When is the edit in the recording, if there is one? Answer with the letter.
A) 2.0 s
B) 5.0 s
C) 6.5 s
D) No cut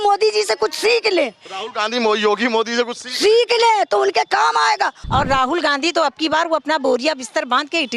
B